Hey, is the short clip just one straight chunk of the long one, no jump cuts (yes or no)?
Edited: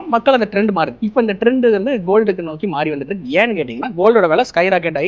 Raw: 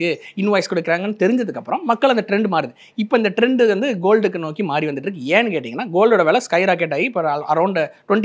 no